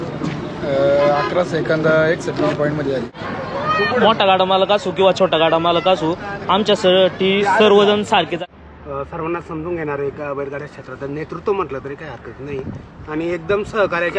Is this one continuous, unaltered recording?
no; 2 cuts; at 3.1 s, 8.4 s

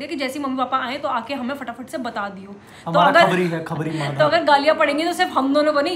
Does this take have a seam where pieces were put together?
no; 0 cuts

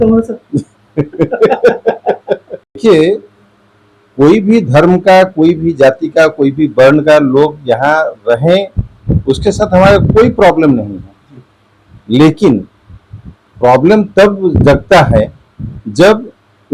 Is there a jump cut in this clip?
yes; 1 cut; at 2.7 s

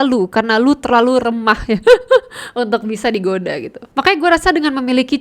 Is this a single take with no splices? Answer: no; 1 cut; at 3.7 s

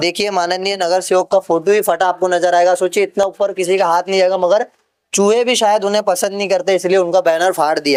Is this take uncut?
yes; 0 cuts

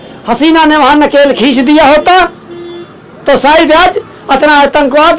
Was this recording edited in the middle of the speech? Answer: no; 0 cuts

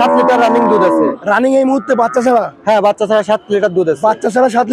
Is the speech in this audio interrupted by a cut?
no; 0 cuts

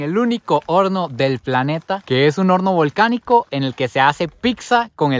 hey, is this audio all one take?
yes; 0 cuts

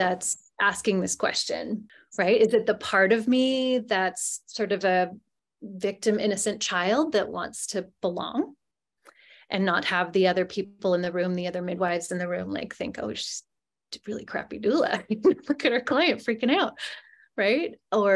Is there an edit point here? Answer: yes; 1 cut; at 2.0 s

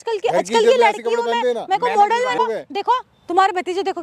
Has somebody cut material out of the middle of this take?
yes; 1 cut; at 2.4 s

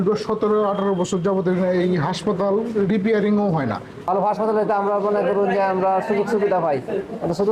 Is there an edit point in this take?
no; 0 cuts

